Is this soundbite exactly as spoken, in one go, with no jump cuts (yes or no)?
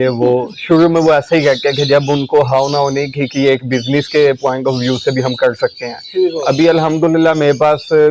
no